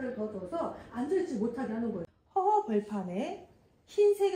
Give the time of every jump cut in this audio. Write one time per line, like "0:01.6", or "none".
0:02.1